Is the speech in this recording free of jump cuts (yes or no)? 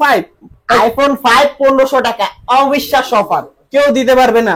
yes